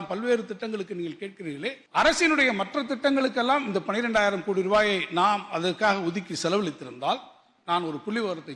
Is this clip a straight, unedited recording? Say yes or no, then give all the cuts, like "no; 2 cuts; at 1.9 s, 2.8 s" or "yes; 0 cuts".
no; 1 cut; at 1.8 s